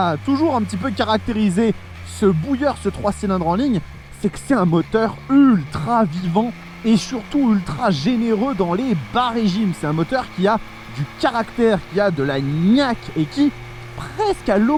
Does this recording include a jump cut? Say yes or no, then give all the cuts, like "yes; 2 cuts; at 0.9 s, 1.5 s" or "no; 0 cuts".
no; 0 cuts